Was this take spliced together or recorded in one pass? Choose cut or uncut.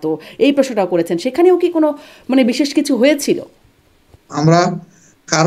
cut